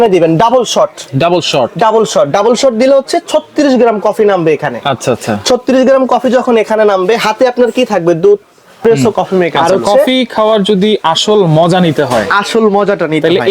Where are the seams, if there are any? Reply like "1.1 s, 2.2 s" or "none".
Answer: 8.7 s